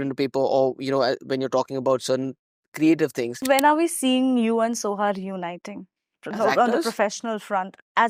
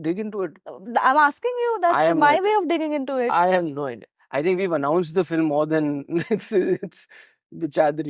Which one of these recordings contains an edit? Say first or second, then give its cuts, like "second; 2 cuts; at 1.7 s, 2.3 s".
first; 1 cut; at 3.4 s